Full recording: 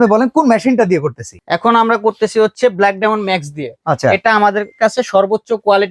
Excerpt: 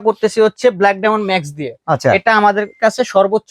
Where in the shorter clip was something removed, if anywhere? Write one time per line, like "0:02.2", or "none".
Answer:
none

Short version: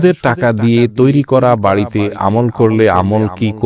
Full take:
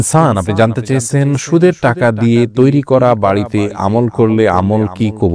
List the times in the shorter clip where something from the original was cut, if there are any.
none

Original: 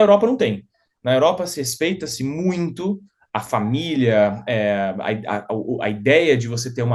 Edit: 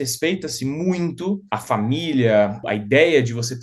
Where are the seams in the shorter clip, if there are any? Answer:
0:01.5
0:02.6

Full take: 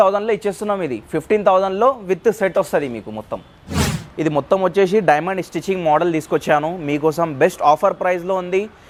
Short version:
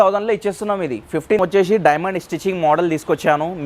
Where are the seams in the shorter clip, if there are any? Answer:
0:01.4

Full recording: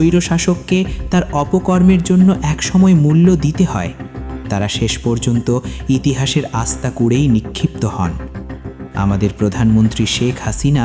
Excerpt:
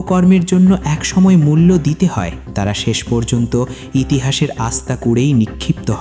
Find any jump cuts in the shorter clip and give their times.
0:02.4

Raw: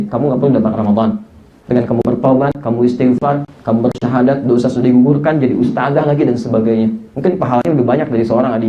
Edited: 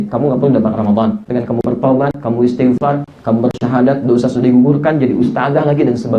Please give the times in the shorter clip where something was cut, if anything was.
0:01.2

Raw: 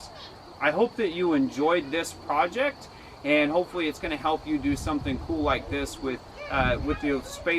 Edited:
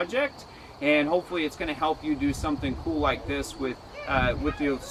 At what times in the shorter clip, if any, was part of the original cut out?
none

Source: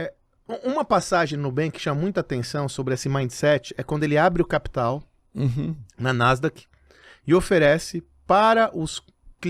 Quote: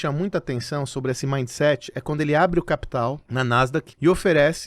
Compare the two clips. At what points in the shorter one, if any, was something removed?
0:03.4

